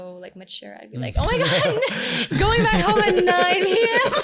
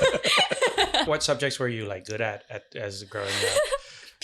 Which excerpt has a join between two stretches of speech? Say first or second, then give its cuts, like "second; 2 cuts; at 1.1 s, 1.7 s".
second; 1 cut; at 1.1 s